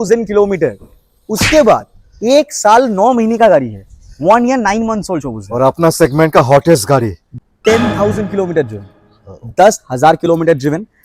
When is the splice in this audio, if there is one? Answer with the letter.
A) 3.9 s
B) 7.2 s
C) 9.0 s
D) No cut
B